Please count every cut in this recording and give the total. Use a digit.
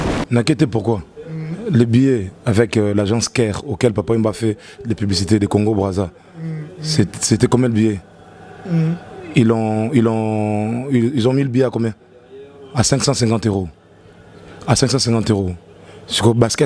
0